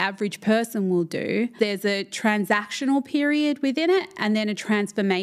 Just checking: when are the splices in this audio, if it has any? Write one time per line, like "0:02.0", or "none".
0:01.5